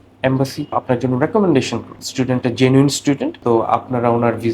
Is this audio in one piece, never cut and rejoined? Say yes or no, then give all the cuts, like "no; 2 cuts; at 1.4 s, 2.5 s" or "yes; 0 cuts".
no; 3 cuts; at 0.7 s, 2.0 s, 3.3 s